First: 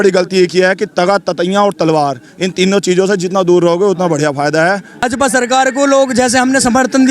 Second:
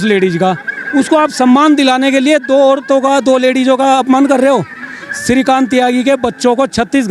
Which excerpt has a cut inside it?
first; 1 cut; at 5.0 s

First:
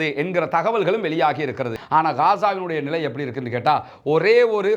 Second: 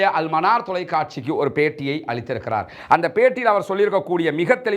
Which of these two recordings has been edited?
first; 1 cut; at 1.8 s

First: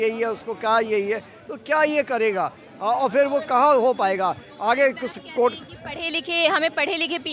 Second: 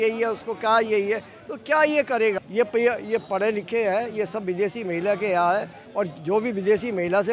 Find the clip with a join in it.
second; 1 cut; at 2.4 s

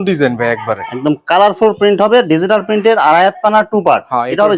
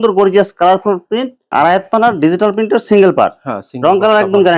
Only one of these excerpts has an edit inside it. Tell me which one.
second; 1 cut; at 1.4 s

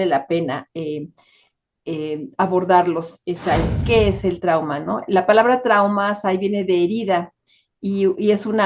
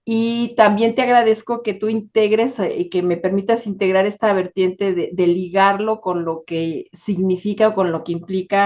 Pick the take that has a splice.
first; 1 cut; at 3.8 s

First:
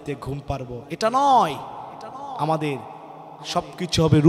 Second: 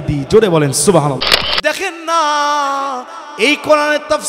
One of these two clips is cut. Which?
second; 1 cut; at 1.6 s

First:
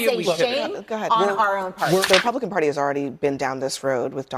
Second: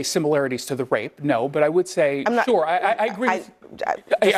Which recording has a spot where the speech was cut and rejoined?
first; 1 cut; at 2.1 s

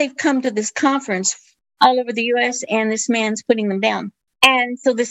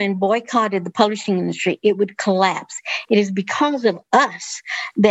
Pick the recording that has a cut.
first; 1 cut; at 1.4 s

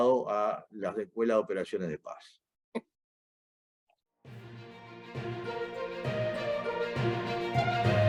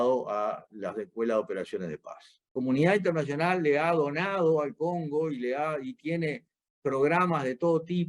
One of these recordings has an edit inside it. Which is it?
second; 1 cut; at 2.5 s

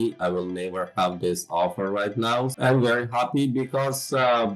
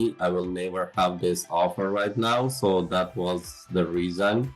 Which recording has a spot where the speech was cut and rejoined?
first; 1 cut; at 2.5 s

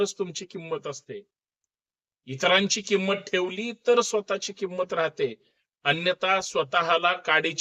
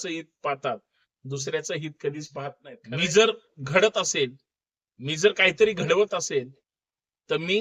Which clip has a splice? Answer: second; 1 cut; at 2.7 s

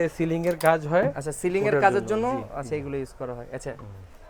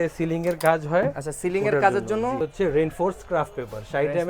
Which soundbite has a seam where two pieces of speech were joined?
second; 1 cut; at 2.4 s

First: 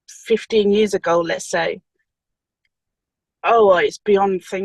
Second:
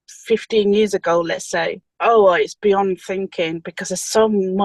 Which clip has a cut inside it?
second; 1 cut; at 1.8 s

